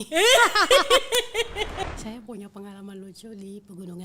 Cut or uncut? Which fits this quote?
cut